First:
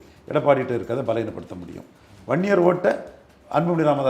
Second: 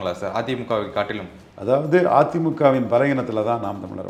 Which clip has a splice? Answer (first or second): first